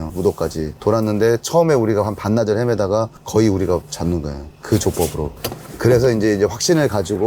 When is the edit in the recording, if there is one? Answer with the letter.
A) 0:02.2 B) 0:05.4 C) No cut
B